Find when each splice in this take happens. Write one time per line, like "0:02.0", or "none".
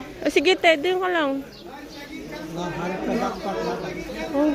none